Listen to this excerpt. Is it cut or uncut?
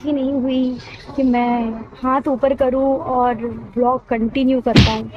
uncut